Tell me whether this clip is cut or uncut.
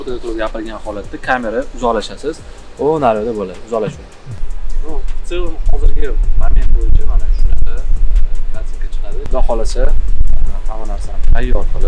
uncut